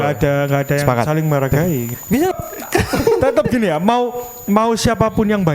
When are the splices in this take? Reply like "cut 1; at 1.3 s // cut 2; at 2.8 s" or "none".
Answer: cut 1; at 2.2 s